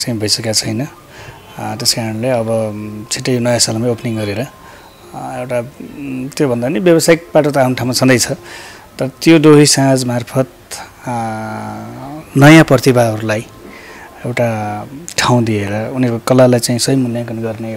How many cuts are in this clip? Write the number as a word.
zero